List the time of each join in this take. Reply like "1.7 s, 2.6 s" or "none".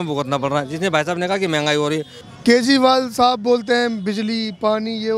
2.2 s